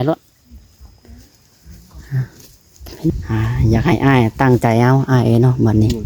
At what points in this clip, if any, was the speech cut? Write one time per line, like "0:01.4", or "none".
0:03.1